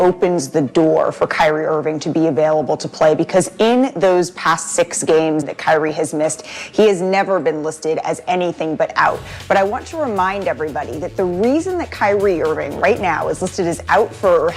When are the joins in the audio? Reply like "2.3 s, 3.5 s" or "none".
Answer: 5.5 s